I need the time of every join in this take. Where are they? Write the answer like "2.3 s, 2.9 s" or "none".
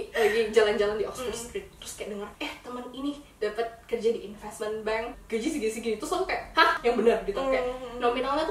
2.3 s, 5.2 s, 6.8 s